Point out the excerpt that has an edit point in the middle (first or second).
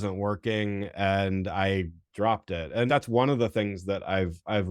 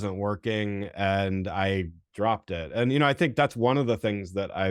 first